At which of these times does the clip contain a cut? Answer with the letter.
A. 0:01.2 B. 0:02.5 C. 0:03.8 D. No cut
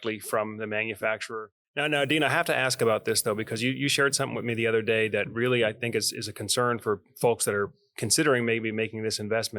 A